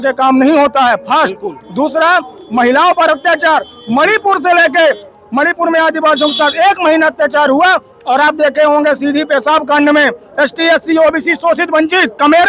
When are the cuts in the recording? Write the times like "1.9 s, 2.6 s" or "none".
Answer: 10.2 s